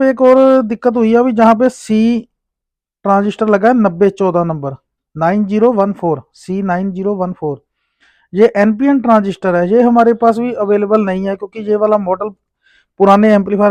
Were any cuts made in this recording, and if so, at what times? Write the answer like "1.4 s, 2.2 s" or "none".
none